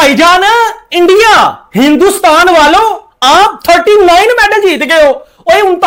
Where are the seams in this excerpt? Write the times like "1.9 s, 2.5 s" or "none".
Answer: none